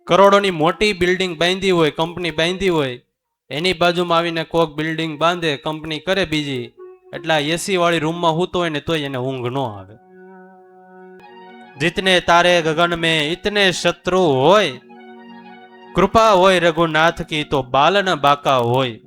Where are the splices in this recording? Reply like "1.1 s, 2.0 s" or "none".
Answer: 11.3 s